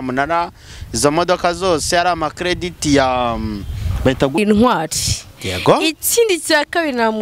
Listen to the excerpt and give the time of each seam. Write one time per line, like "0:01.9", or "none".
0:04.4